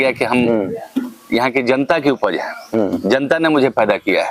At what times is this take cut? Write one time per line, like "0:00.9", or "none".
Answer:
none